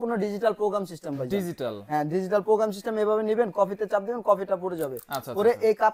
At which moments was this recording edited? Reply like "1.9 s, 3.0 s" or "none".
none